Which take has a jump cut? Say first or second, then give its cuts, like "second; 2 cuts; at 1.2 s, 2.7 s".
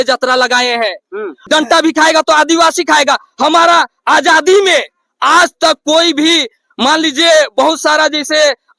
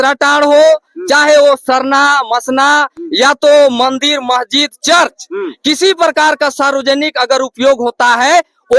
first; 1 cut; at 1.4 s